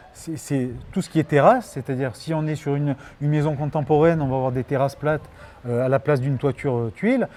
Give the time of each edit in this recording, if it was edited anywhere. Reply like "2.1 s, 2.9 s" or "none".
none